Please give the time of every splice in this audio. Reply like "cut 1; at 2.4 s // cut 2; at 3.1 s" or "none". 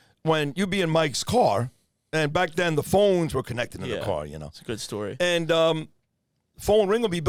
none